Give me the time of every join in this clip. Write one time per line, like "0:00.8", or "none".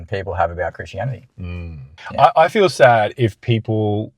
0:01.9